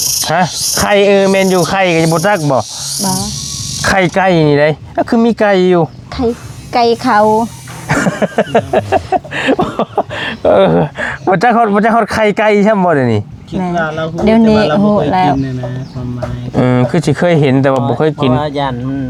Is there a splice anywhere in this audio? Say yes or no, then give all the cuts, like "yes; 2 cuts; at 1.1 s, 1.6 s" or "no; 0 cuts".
no; 0 cuts